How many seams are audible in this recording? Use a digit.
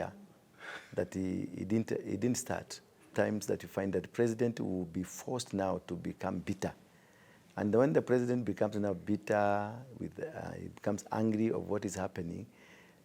1